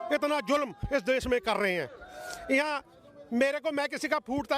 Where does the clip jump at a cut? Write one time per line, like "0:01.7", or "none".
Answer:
none

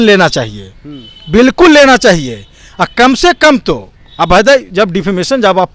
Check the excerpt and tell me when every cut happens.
none

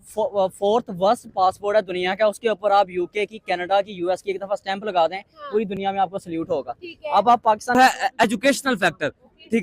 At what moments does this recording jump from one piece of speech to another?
0:07.7

